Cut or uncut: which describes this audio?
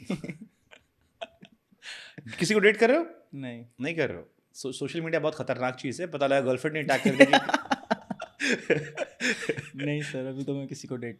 uncut